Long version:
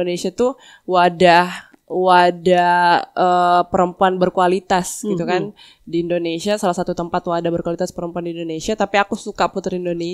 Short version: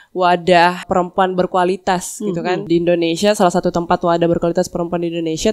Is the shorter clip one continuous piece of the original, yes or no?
no